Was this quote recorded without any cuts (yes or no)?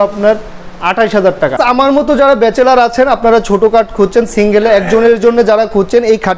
no